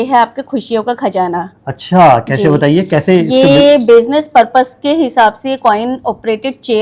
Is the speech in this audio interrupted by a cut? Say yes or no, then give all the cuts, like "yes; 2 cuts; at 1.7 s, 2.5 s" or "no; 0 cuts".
no; 0 cuts